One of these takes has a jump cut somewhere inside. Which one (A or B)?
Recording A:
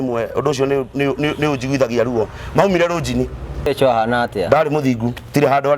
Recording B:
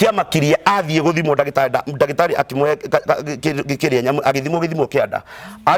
A